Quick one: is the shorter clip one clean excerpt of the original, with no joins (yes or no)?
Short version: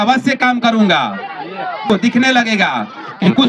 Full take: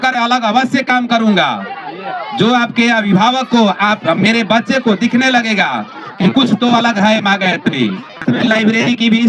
no